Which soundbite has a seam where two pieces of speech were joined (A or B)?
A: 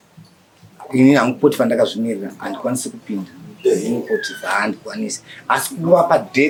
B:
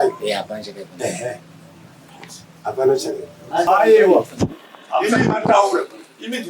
B